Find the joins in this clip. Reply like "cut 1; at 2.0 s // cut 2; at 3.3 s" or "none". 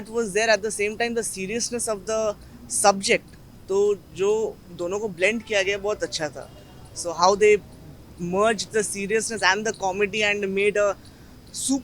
none